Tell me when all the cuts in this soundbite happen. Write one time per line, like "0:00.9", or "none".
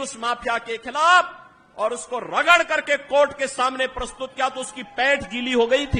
none